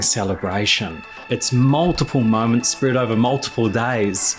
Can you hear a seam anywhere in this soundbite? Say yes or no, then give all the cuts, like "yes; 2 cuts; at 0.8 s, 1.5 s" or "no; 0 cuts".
yes; 1 cut; at 1.1 s